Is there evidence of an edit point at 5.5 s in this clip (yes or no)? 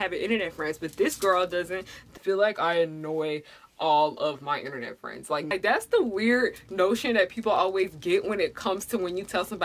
yes